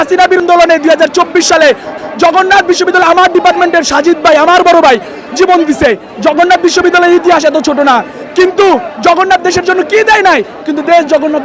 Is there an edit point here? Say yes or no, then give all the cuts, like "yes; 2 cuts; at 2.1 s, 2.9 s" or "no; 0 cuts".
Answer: no; 0 cuts